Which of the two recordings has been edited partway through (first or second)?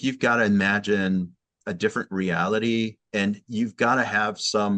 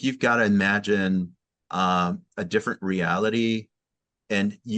first